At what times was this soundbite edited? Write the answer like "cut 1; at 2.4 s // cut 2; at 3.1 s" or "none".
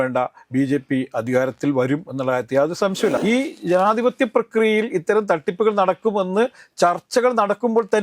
cut 1; at 3.2 s